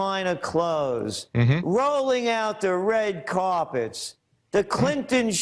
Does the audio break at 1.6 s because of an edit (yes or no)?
yes